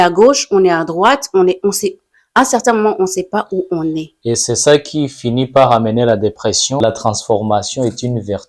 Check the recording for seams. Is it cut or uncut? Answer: cut